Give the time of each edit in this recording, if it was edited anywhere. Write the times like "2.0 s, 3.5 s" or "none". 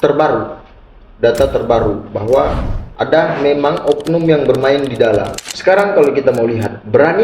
5.4 s